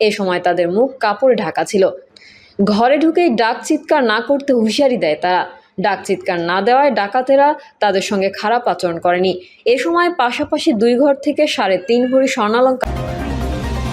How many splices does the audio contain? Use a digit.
1